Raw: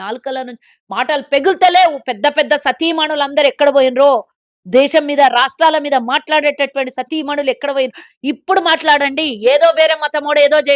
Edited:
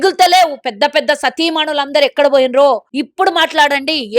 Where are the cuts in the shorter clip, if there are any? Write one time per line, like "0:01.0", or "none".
0:03.0